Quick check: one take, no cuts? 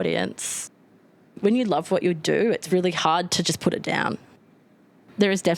no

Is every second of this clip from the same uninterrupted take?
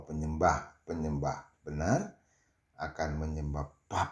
yes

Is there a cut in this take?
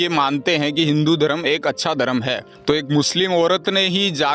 yes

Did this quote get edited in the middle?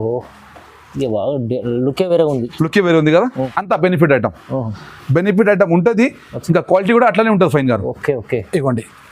yes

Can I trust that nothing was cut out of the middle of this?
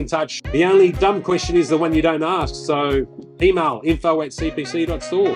yes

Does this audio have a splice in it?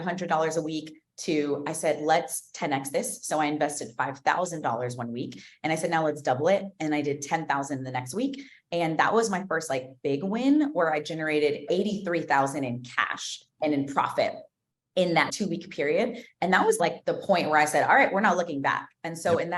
yes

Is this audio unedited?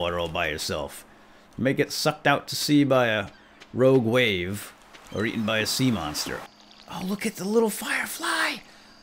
no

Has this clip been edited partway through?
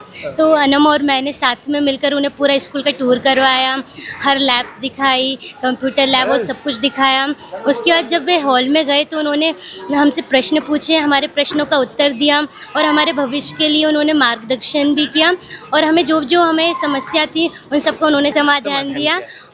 no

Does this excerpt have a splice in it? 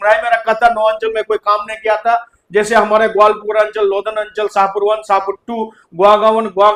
no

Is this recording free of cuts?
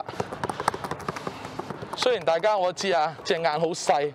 no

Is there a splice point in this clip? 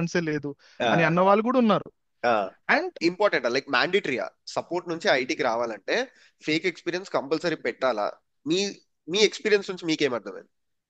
yes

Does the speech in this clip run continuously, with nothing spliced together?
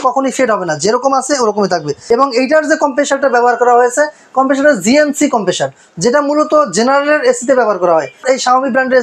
no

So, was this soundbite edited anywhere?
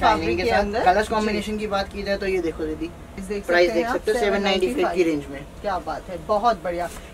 yes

